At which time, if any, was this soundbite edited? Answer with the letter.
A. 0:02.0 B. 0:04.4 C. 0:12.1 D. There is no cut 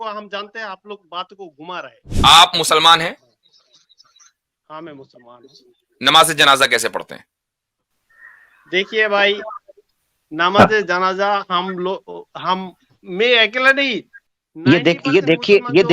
A